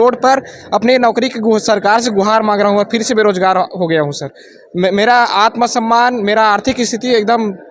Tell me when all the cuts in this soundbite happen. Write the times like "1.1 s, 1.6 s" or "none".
none